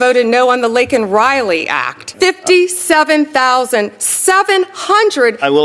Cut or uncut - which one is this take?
cut